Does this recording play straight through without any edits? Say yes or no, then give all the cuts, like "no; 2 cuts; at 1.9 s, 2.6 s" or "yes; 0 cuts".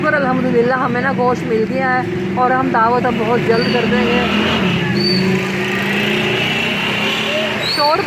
yes; 0 cuts